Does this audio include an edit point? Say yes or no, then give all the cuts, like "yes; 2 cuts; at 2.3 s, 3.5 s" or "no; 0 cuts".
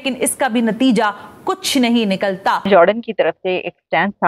yes; 1 cut; at 2.7 s